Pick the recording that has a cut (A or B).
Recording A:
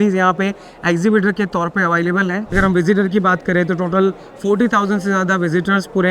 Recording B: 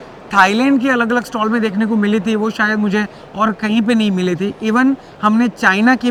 A